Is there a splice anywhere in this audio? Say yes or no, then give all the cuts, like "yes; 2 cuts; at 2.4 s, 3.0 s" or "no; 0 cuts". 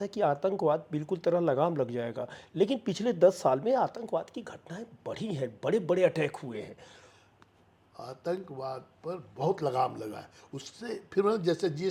no; 0 cuts